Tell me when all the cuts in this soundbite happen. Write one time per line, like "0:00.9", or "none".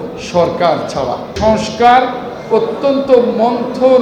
0:01.4